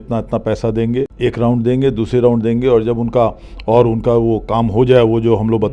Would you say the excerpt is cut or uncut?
cut